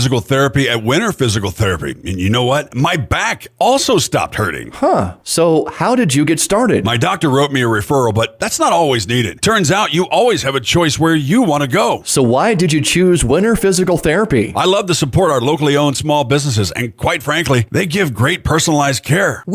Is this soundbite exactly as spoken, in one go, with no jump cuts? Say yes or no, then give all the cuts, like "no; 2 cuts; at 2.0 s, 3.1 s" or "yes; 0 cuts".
yes; 0 cuts